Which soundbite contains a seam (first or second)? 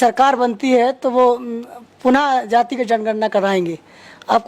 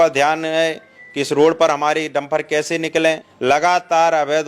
second